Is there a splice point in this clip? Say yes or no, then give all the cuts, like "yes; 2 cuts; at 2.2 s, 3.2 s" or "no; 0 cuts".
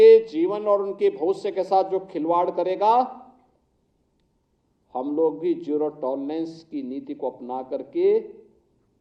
no; 0 cuts